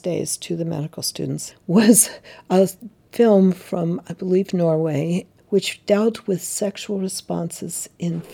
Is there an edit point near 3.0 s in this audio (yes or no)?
no